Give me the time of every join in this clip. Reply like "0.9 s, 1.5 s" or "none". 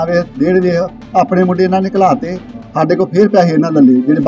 none